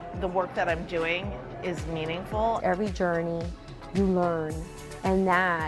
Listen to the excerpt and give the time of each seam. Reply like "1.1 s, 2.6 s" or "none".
2.6 s

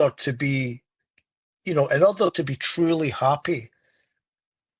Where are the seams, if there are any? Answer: none

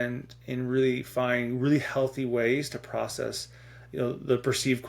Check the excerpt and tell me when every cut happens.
none

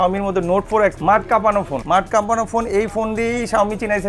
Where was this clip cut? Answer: none

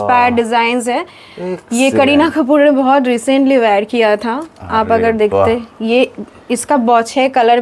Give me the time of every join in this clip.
none

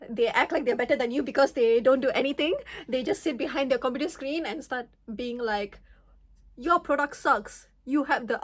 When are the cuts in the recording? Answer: none

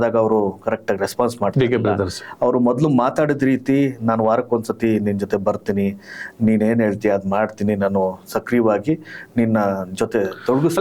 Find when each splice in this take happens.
none

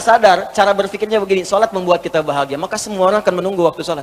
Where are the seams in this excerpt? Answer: none

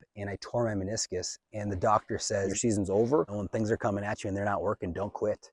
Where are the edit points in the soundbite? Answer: 2.5 s, 3.4 s

